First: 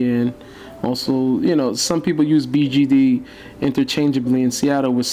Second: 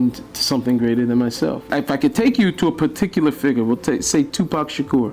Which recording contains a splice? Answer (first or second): second